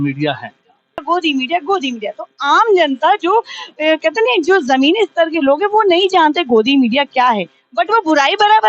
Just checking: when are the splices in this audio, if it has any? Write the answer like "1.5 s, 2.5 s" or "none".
1.0 s